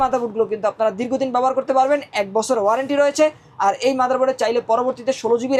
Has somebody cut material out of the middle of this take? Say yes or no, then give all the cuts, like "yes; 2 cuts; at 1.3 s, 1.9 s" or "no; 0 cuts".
no; 0 cuts